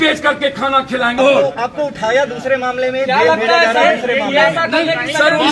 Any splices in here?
yes; 1 cut; at 1.2 s

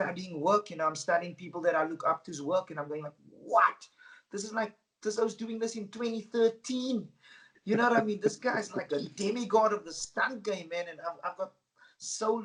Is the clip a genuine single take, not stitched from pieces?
yes; 0 cuts

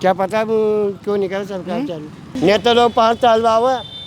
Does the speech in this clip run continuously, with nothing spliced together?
no; 1 cut; at 2.3 s

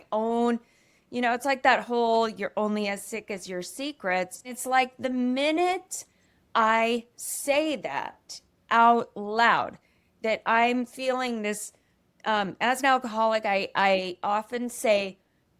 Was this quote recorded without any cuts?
no; 1 cut; at 4.5 s

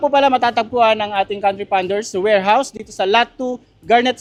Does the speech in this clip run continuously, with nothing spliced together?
yes; 0 cuts

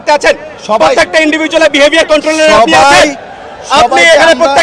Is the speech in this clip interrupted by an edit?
no; 0 cuts

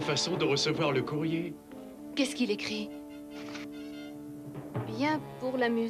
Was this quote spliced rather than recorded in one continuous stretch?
yes; 1 cut; at 2.9 s

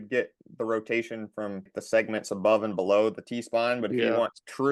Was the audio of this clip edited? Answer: yes; 1 cut; at 1.7 s

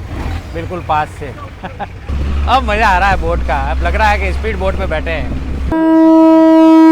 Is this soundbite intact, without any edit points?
no; 2 cuts; at 2.1 s, 5.7 s

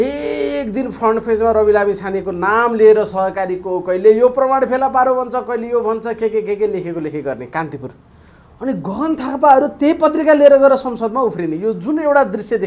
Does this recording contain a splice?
no; 0 cuts

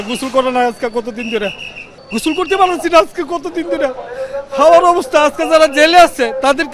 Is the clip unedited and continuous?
yes; 0 cuts

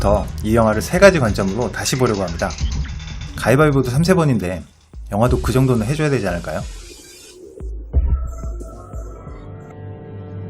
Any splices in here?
no; 0 cuts

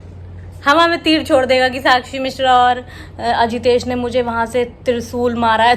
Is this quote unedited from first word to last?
yes; 0 cuts

